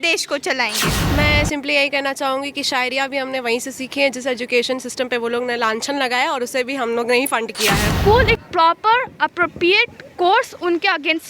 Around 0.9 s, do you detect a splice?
yes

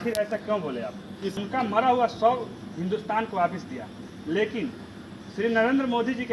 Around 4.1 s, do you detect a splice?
no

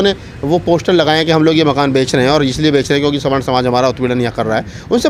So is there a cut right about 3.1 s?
no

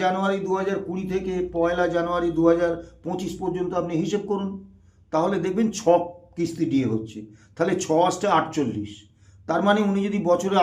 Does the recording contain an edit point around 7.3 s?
no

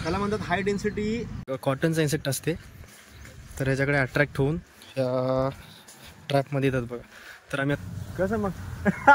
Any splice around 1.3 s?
yes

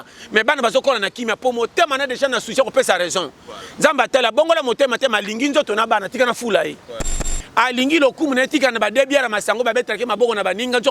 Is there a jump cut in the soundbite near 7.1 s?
yes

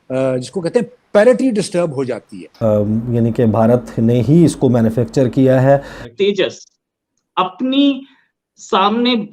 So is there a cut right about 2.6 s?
yes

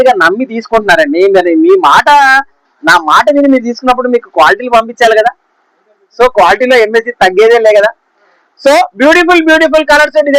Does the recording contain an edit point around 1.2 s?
no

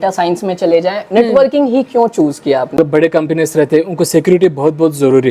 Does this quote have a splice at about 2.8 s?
yes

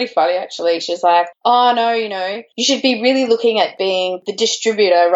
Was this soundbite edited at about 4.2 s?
yes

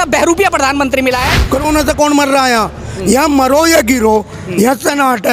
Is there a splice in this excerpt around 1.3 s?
yes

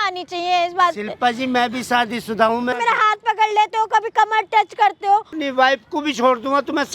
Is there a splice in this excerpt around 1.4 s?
no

